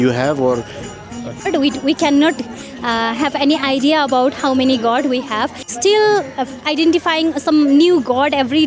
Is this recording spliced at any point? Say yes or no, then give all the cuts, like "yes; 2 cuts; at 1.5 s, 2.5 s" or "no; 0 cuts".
yes; 2 cuts; at 1.5 s, 5.7 s